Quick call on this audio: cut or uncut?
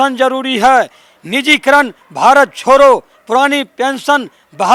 uncut